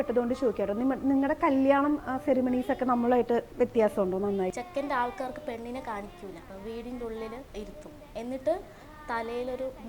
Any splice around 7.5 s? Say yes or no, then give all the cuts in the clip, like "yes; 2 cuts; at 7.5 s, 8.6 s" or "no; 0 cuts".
yes; 3 cuts; at 4.5 s, 6.5 s, 7.5 s